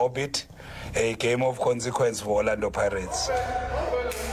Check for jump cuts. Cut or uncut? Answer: uncut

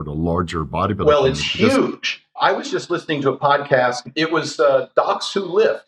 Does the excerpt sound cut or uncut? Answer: cut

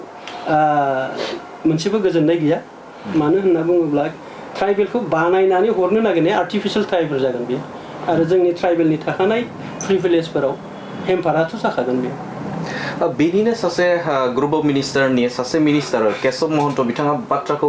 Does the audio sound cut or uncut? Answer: uncut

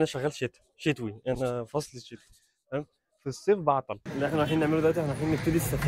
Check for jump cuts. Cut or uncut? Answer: cut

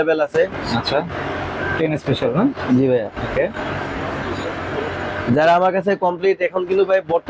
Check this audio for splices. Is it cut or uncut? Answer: uncut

